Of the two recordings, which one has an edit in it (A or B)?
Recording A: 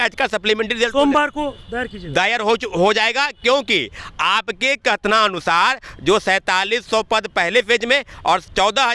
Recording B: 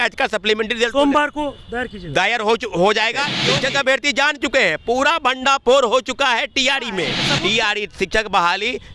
B